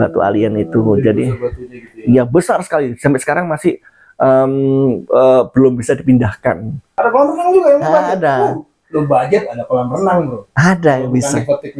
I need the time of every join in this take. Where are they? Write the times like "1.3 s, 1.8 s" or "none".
6.9 s